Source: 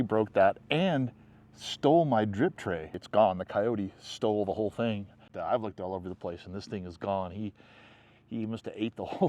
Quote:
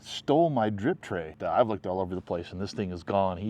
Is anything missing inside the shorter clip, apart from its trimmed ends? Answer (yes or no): yes